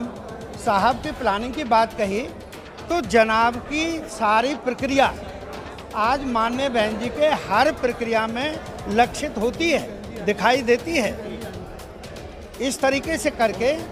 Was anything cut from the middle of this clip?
no; 0 cuts

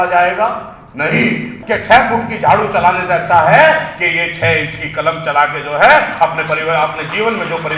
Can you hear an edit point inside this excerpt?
yes; 1 cut; at 1.5 s

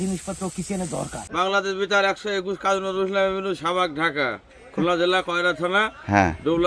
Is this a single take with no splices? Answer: no; 1 cut; at 1.2 s

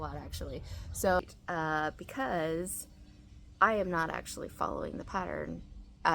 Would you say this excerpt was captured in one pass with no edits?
no; 1 cut; at 1.2 s

